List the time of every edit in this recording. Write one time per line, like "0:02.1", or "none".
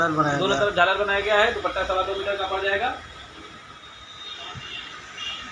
0:03.9

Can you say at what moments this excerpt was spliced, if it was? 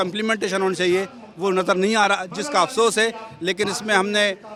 none

